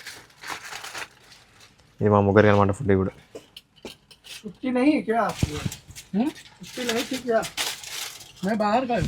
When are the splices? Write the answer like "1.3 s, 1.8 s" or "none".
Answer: none